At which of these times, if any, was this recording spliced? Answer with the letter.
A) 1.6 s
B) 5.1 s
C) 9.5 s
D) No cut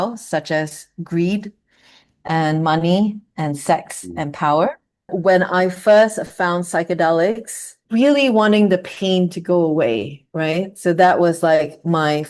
B